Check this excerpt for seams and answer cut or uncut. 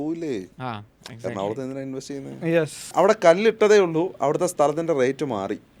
cut